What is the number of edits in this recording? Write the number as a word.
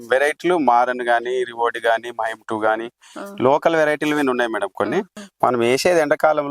one